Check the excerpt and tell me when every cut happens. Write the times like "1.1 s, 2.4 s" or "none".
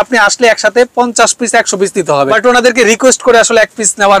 2.3 s